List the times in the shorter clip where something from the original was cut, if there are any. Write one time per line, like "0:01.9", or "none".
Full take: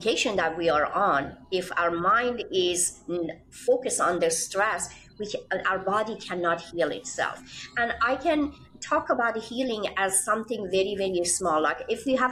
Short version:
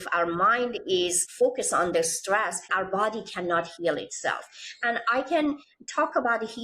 0:01.2
0:02.7